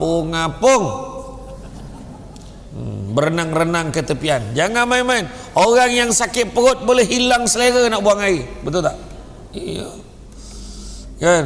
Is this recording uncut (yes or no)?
yes